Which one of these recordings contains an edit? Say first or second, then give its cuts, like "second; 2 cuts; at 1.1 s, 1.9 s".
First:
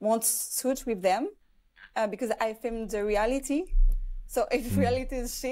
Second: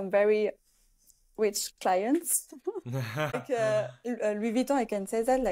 second; 1 cut; at 3.3 s